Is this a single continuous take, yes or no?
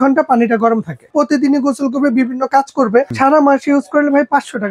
no